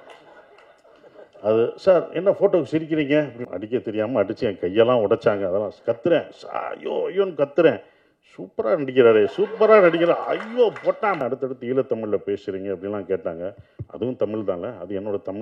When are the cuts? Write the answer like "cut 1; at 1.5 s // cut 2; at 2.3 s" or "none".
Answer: cut 1; at 3.4 s // cut 2; at 11.2 s